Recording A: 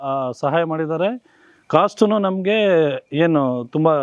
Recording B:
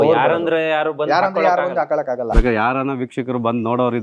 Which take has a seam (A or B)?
B